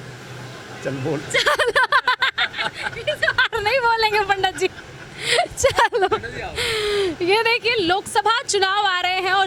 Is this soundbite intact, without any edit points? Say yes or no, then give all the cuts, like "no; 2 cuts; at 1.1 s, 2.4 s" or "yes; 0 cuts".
yes; 0 cuts